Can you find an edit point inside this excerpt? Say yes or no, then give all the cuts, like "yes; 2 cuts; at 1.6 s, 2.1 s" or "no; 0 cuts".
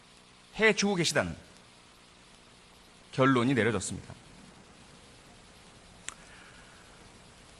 no; 0 cuts